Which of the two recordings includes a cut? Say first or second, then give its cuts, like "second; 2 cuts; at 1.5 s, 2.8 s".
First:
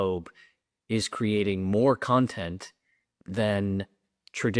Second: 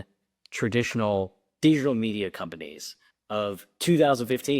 second; 1 cut; at 3.7 s